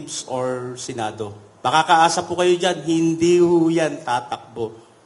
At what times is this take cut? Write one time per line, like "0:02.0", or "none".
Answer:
none